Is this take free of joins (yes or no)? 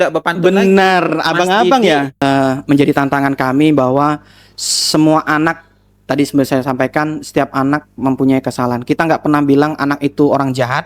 no